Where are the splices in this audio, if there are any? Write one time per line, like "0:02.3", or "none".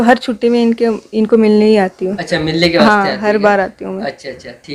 none